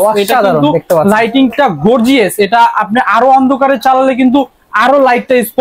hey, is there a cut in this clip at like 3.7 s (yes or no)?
no